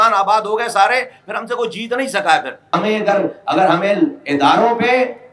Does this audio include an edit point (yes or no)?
yes